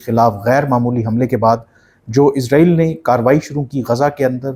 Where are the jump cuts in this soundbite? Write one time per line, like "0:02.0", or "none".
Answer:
none

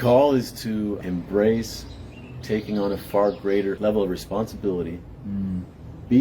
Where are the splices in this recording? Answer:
0:01.0
0:03.8

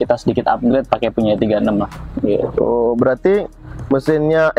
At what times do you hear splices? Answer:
none

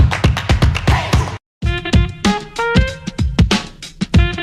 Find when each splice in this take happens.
none

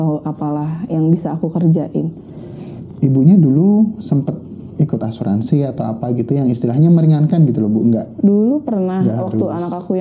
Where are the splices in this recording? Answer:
0:02.9

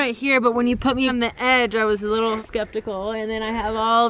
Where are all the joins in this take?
0:01.1
0:02.4

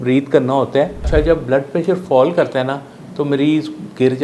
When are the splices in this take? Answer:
0:01.1

